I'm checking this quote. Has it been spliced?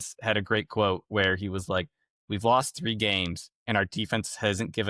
no; 0 cuts

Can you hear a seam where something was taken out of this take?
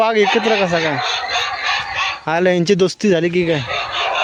no; 0 cuts

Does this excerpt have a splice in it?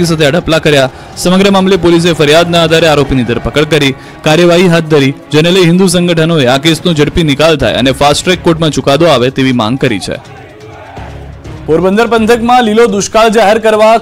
no; 0 cuts

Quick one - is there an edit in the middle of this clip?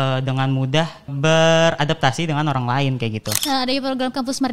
yes; 2 cuts; at 1.1 s, 3.3 s

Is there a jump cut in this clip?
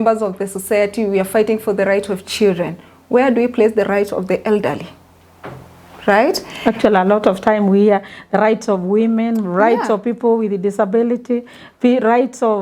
no; 0 cuts

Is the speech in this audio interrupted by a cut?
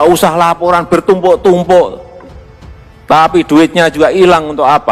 no; 0 cuts

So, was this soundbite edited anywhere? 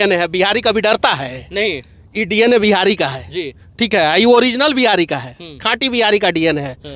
no; 0 cuts

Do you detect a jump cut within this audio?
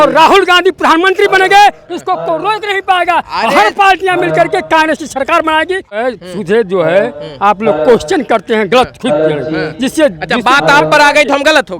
yes; 1 cut; at 6.0 s

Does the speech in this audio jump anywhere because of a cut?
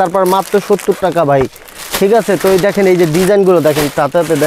no; 0 cuts

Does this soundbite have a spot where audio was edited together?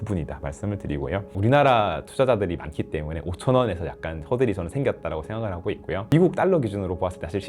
yes; 1 cut; at 1.2 s

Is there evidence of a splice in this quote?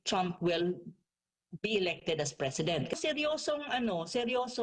yes; 1 cut; at 2.9 s

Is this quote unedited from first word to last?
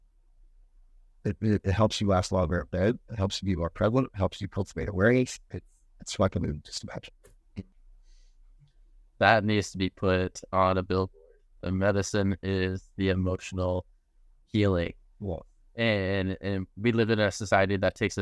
no; 1 cut; at 7.8 s

